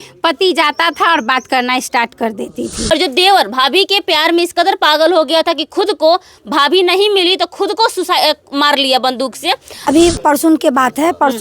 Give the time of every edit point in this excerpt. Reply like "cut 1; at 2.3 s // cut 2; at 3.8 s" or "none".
cut 1; at 2.8 s // cut 2; at 9.9 s